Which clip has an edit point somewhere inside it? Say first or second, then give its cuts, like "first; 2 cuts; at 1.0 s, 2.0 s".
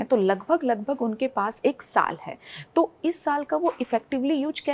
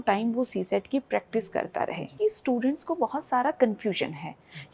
second; 1 cut; at 2.1 s